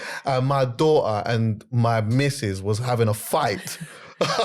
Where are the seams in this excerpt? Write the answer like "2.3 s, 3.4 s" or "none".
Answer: none